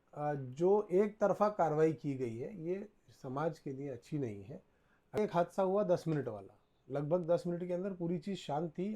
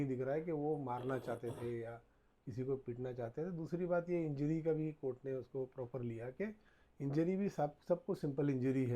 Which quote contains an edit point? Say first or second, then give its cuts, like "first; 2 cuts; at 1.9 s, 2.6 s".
first; 1 cut; at 5.2 s